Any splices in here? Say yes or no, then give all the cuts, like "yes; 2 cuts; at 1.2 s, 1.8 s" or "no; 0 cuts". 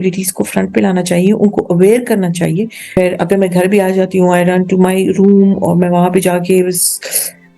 yes; 1 cut; at 2.9 s